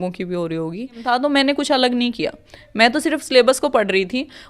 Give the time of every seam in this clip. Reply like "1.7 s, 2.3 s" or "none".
1.0 s